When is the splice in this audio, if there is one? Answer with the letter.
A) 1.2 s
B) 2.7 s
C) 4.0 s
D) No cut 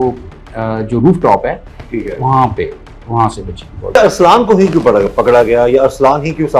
C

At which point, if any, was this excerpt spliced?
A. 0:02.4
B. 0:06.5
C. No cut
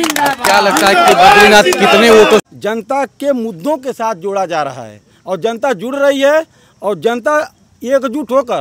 A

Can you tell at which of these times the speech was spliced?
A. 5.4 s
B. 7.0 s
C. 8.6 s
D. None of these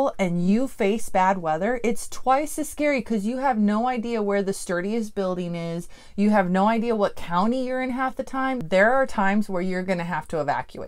C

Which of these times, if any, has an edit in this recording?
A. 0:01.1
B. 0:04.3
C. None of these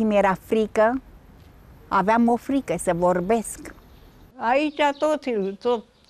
B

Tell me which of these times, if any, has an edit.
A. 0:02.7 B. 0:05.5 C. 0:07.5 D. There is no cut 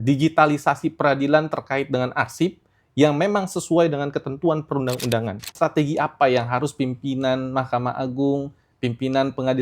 B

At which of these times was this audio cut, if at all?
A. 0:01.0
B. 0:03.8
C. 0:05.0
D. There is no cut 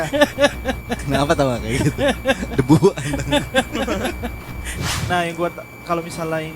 C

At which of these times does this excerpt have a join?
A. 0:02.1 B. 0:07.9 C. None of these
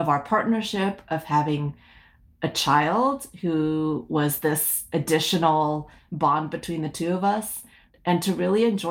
B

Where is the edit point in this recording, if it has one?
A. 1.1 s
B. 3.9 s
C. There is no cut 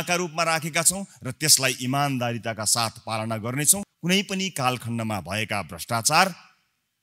B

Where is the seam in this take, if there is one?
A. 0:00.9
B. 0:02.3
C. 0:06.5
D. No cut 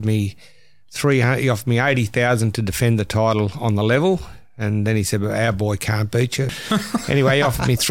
C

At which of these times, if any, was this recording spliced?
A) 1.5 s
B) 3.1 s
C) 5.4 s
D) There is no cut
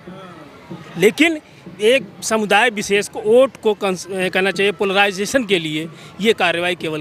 D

